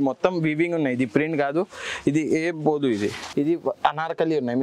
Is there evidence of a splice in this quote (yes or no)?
yes